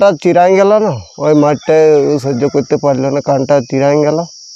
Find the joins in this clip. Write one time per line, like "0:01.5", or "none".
none

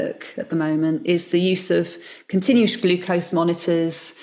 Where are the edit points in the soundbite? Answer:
none

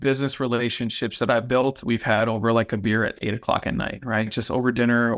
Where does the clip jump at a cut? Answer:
none

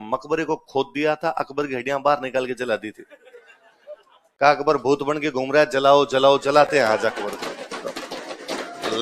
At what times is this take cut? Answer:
none

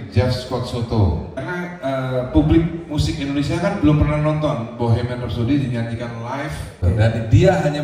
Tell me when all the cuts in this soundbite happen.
0:01.3
0:06.8

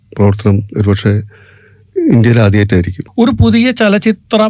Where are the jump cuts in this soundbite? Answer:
0:03.0

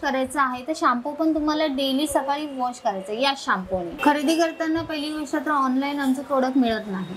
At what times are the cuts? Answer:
0:03.9

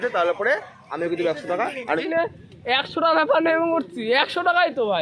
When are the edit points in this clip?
0:02.0

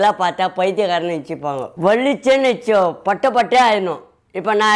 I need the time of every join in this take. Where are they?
0:01.7

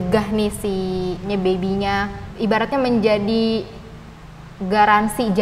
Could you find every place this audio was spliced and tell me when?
0:01.3
0:02.2

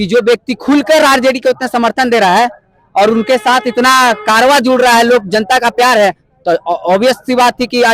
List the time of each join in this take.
none

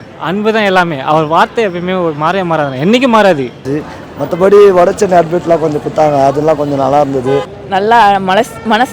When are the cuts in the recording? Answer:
0:03.7
0:07.5

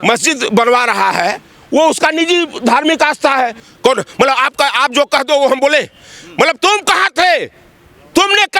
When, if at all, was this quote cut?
0:03.6

